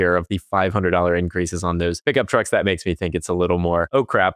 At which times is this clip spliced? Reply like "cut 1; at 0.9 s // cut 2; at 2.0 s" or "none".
cut 1; at 2.0 s